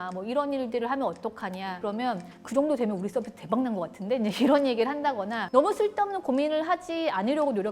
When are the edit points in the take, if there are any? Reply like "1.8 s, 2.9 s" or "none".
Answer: 1.8 s

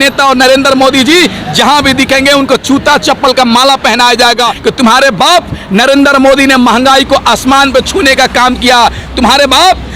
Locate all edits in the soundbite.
4.5 s

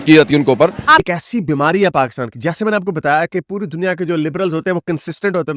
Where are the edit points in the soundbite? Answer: 1.0 s

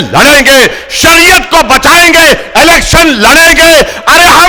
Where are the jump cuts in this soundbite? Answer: none

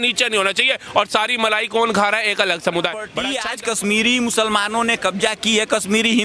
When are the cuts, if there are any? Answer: 3.2 s

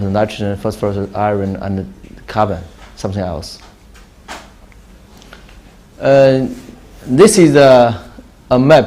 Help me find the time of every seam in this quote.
3.5 s

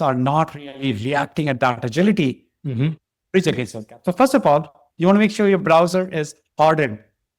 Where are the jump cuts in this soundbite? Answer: none

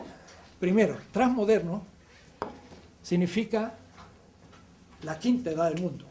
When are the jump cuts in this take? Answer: none

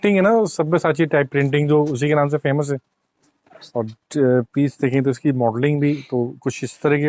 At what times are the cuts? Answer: none

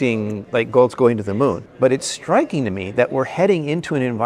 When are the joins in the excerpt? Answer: 1.7 s

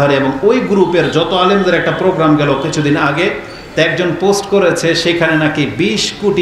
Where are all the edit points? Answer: none

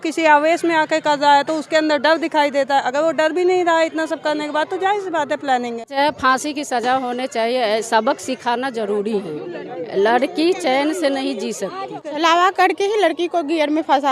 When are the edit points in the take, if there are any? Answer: 5.9 s, 12.0 s

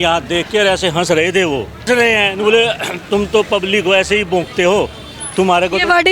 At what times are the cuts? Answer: 1.8 s

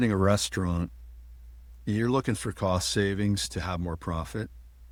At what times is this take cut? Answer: none

